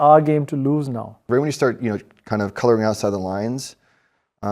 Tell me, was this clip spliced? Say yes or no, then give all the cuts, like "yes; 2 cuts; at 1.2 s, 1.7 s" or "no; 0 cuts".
yes; 1 cut; at 1.1 s